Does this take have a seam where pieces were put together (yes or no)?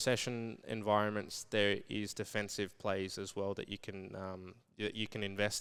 no